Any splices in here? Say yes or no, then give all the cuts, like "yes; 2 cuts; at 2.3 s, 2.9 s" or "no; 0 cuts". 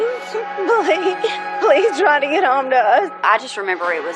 yes; 1 cut; at 3.3 s